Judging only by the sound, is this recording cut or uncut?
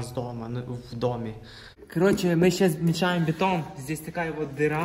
cut